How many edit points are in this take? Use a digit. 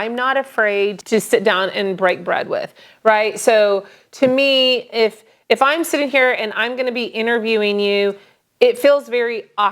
1